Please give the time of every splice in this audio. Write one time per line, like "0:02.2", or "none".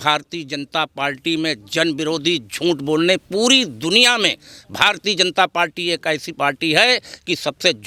none